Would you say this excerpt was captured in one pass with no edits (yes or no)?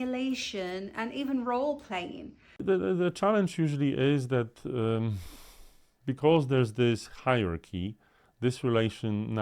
no